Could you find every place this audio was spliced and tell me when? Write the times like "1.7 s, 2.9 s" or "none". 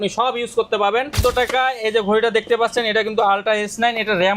1.2 s